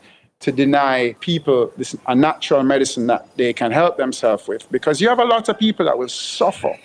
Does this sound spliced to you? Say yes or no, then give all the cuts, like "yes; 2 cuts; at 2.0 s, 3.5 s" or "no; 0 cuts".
yes; 1 cut; at 1.2 s